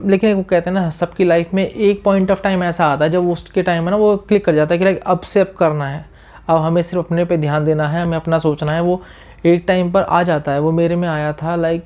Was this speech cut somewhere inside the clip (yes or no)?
no